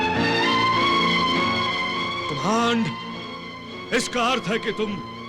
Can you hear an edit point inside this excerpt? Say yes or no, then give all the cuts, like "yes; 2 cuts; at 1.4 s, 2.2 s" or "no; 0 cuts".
no; 0 cuts